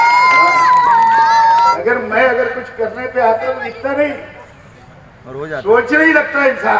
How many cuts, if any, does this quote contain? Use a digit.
1